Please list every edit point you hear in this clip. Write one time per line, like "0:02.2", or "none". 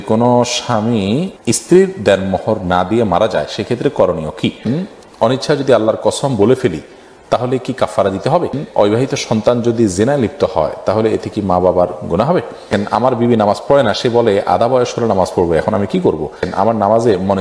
0:01.3
0:04.7
0:08.6
0:12.7
0:16.4